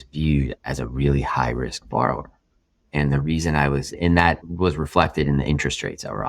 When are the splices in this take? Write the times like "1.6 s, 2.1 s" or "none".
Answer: 4.0 s